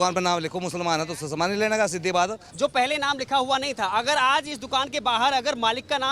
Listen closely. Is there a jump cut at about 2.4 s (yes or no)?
yes